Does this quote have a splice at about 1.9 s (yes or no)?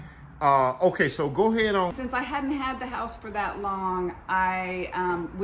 yes